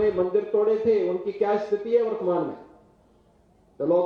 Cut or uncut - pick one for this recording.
uncut